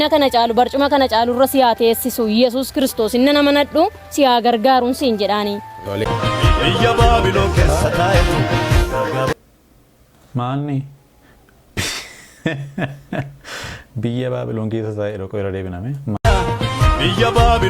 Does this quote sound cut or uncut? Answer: cut